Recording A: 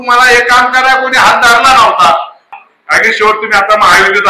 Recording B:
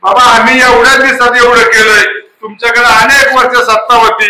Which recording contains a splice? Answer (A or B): A